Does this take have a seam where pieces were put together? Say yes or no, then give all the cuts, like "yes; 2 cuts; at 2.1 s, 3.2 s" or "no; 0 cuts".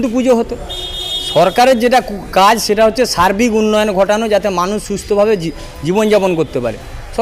no; 0 cuts